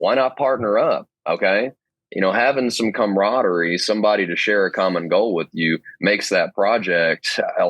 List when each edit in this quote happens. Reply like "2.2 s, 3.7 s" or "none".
1.9 s